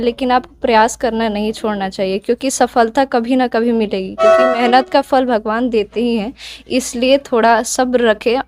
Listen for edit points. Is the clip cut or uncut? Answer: uncut